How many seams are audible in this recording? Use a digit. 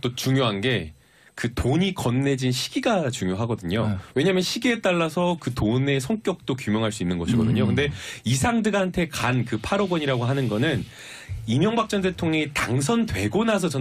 0